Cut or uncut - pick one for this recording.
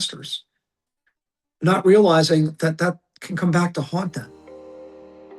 uncut